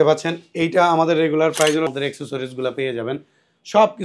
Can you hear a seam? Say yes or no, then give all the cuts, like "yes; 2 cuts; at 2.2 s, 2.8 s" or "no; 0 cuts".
yes; 1 cut; at 1.9 s